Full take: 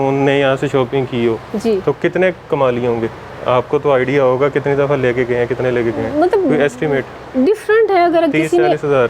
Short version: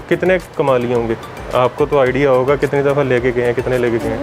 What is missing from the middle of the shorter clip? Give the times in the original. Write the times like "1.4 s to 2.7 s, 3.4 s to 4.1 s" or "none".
none